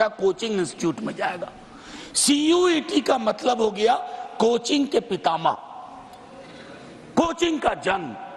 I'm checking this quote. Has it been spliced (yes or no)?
no